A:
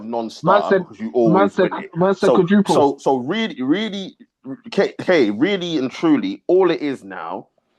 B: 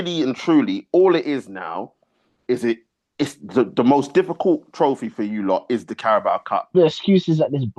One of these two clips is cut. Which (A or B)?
B